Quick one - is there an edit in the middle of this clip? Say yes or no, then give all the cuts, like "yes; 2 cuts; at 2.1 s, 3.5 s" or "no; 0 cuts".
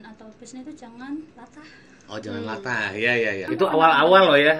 yes; 1 cut; at 3.5 s